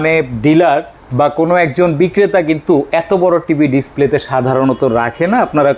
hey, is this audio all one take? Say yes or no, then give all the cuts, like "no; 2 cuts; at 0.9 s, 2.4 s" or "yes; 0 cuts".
no; 1 cut; at 1.0 s